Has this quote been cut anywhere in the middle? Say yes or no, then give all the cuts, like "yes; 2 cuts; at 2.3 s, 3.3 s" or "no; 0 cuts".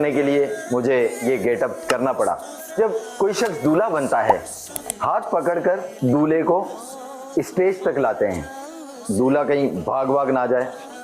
yes; 1 cut; at 4.8 s